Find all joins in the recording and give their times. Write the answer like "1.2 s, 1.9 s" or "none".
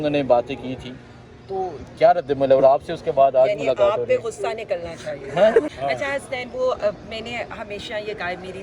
5.7 s